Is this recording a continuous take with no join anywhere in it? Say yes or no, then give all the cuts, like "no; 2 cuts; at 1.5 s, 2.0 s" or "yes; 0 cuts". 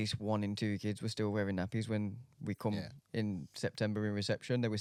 yes; 0 cuts